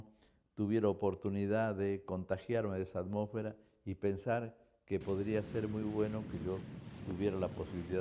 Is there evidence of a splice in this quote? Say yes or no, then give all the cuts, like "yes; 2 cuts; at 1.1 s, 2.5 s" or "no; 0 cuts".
yes; 1 cut; at 4.5 s